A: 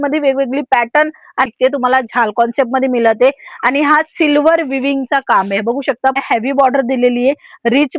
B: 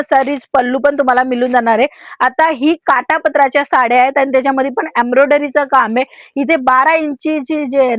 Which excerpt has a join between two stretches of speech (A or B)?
A